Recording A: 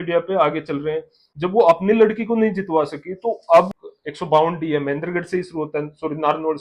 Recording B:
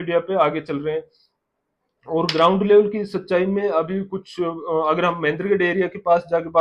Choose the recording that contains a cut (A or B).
A